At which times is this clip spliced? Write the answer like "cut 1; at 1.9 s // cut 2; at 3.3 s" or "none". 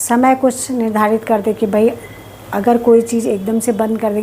none